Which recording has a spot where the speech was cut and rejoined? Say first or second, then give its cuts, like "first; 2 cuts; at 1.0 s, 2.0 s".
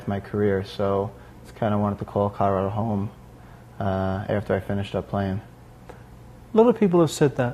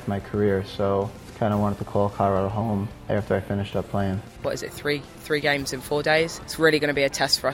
second; 4 cuts; at 1.2 s, 3.0 s, 4.4 s, 6.4 s